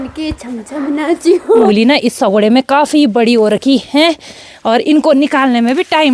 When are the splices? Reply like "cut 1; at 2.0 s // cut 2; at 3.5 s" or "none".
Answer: cut 1; at 1.7 s